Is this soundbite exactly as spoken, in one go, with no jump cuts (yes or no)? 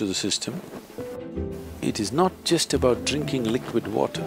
no